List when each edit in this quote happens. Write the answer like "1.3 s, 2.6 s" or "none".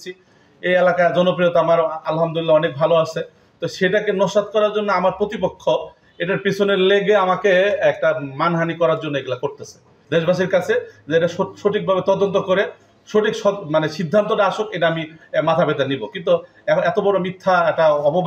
none